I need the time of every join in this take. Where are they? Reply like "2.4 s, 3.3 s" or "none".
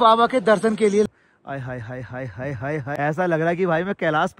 1.1 s, 2.9 s

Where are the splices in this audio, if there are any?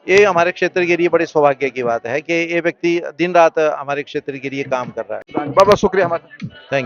none

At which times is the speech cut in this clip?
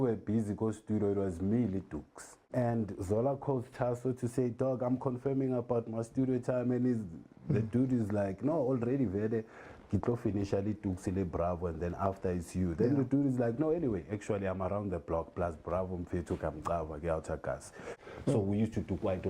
2.5 s, 17.8 s

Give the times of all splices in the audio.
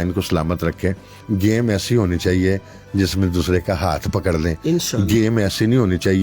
1.1 s

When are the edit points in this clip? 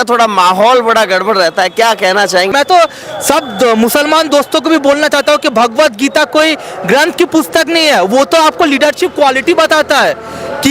2.5 s

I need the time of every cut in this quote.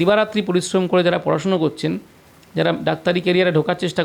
none

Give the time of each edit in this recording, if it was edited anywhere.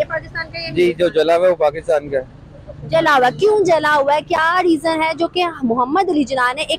none

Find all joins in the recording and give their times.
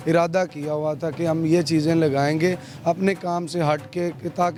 none

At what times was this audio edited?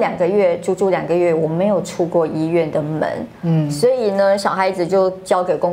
none

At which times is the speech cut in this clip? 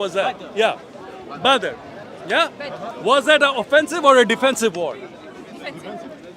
2.0 s, 2.9 s

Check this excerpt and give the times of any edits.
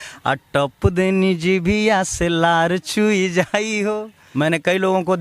4.2 s

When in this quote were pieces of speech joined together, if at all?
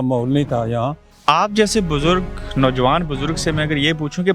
1.0 s

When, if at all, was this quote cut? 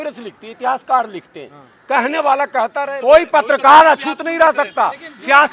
2.9 s

